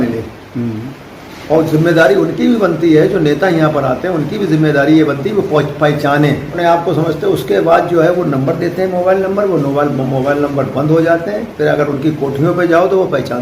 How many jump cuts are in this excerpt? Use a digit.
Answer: 1